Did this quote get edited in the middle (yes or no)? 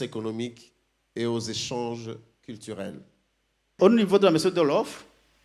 yes